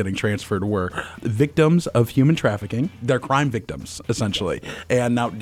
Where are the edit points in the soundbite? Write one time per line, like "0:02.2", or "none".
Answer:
0:01.2
0:03.0